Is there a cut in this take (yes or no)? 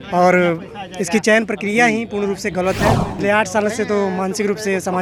yes